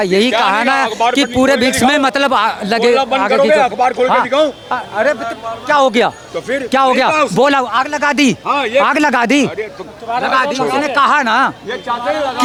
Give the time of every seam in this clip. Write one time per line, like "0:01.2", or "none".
none

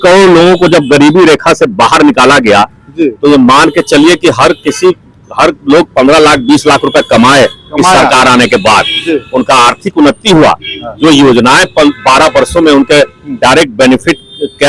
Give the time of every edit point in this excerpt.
none

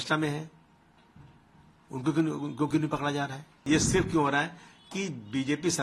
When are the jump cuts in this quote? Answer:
0:03.6

